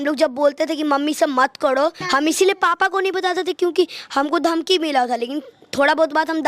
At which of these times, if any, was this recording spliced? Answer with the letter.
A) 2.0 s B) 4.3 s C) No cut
A